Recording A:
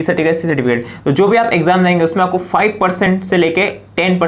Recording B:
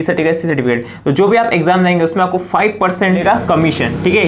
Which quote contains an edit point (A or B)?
B